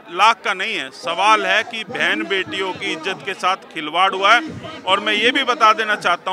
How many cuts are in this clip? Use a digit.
0